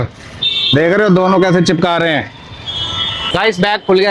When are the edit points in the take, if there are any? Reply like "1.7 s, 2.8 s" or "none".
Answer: 3.2 s